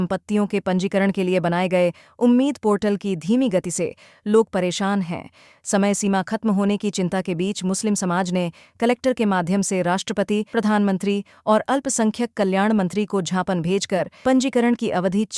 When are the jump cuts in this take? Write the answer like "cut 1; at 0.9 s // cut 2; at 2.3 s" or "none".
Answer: none